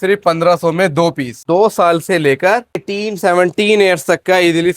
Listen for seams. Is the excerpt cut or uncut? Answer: cut